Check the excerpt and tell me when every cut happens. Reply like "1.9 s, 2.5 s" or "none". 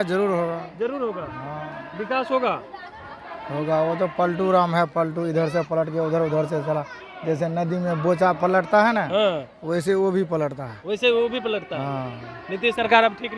none